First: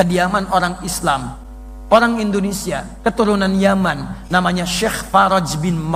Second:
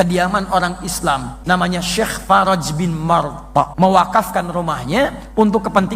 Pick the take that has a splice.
second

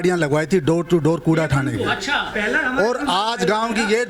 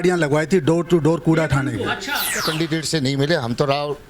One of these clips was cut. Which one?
second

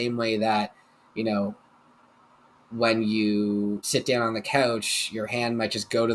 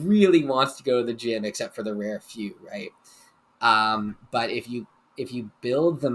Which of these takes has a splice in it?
first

